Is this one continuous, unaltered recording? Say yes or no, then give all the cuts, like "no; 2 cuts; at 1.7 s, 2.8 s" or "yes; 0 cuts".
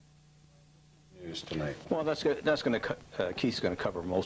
no; 1 cut; at 1.4 s